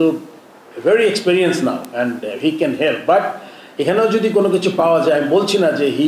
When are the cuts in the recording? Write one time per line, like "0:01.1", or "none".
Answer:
none

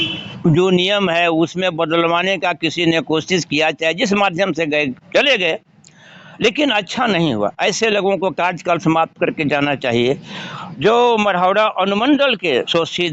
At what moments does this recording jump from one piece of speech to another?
none

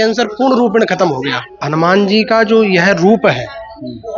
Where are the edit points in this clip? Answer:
0:01.9

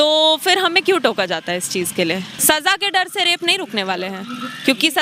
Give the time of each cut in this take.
0:02.3

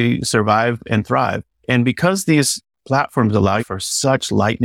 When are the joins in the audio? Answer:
0:01.6
0:03.7

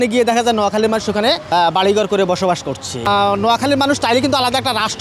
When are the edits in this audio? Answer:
0:01.4
0:03.1

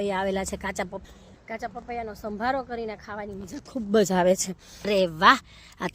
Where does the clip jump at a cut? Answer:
0:01.0
0:04.9

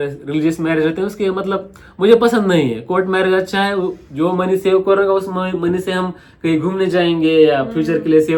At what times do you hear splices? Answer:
none

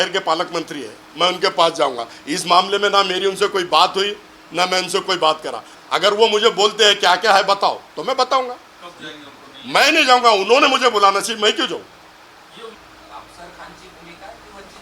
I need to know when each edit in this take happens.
0:05.8
0:12.8

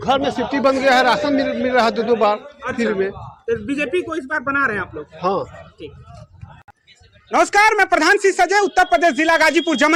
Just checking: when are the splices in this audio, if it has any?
none

